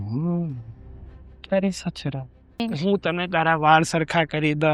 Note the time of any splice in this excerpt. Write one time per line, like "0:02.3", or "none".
0:02.7